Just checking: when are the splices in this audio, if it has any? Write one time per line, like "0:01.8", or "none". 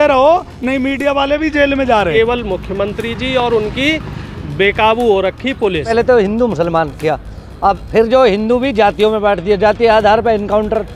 0:02.1
0:05.9